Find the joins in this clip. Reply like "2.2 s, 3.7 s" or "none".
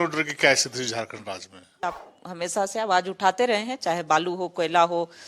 1.8 s